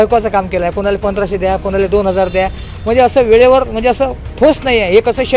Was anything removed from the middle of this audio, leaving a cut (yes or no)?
no